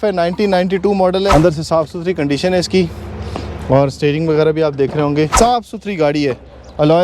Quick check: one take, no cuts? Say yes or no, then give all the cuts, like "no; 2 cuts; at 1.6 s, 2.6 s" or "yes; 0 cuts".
no; 2 cuts; at 1.3 s, 5.3 s